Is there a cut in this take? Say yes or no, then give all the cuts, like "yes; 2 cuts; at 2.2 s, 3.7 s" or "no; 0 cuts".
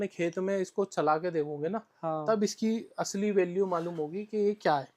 no; 0 cuts